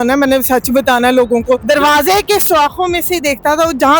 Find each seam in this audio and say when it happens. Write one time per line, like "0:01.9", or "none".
0:01.6